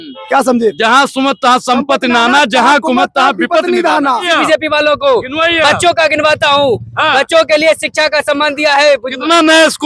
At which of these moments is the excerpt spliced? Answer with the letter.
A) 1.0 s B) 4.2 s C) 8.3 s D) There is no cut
B